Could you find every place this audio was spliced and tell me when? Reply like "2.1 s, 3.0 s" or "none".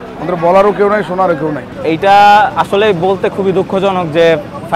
1.7 s